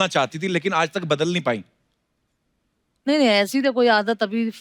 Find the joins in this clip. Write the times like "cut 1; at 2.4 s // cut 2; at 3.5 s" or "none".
none